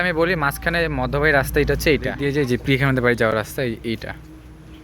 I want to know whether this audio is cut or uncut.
cut